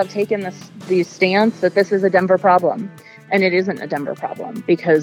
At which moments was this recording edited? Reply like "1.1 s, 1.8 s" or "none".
none